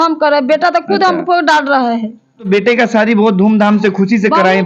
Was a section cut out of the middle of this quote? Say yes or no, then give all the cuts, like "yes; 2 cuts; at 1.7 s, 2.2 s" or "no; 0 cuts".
yes; 1 cut; at 2.5 s